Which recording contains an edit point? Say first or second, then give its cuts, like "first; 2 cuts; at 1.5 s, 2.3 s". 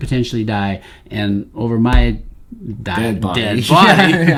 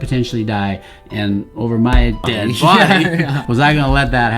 second; 2 cuts; at 2.2 s, 3.4 s